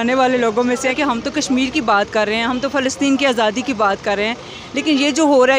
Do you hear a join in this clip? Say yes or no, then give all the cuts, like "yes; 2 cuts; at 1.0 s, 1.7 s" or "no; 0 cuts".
yes; 1 cut; at 1.0 s